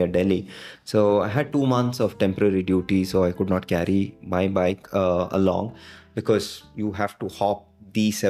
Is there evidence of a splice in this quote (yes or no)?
no